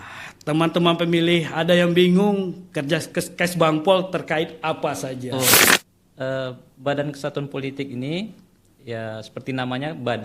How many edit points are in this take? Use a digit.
1